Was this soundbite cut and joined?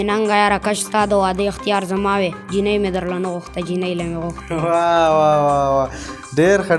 no; 0 cuts

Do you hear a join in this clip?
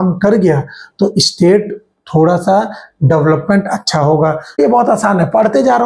yes; 1 cut; at 4.6 s

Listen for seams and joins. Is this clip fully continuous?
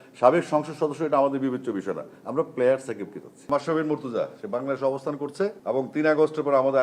no; 2 cuts; at 3.4 s, 5.6 s

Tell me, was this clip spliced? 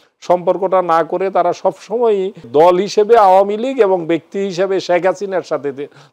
yes; 1 cut; at 2.5 s

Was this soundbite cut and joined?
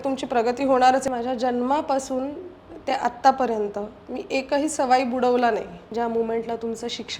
yes; 2 cuts; at 1.1 s, 5.8 s

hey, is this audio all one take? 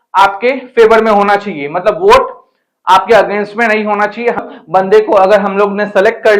no; 1 cut; at 4.4 s

